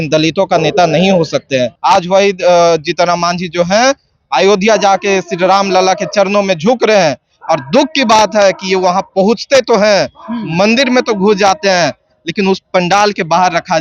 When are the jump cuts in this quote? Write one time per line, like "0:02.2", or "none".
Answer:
0:01.7